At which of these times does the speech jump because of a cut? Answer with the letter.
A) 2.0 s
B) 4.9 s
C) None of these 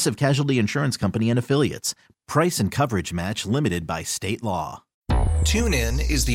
B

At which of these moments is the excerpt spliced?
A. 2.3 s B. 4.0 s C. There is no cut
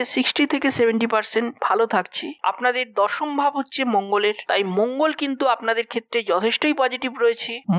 A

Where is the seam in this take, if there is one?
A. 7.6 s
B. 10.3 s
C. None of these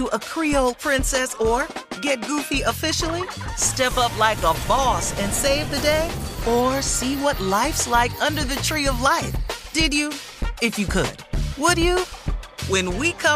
C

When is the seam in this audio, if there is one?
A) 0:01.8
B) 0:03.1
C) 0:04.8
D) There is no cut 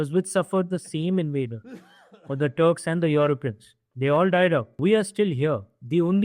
C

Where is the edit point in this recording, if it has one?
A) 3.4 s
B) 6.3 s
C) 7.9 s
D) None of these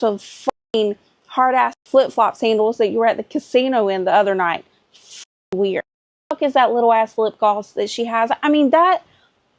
B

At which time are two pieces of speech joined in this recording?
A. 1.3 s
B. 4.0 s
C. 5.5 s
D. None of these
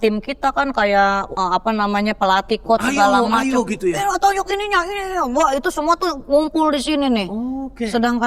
A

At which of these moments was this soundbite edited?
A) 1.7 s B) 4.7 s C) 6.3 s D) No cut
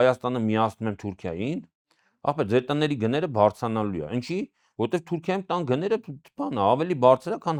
D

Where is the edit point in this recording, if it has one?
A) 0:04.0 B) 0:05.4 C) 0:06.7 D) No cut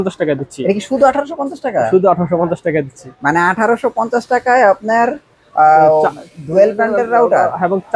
D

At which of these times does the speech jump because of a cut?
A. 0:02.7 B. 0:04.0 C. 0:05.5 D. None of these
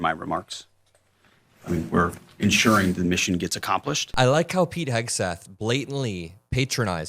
B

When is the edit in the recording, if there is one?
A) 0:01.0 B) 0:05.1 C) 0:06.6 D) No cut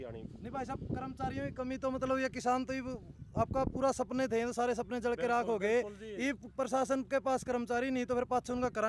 D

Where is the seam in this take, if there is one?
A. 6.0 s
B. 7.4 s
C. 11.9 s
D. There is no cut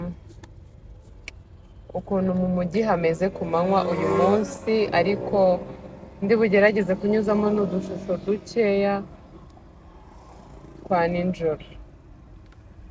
D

